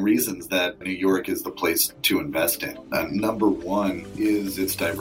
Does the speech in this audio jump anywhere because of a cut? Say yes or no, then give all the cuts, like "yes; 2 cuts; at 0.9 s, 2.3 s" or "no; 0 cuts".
yes; 3 cuts; at 1.9 s, 2.7 s, 4.1 s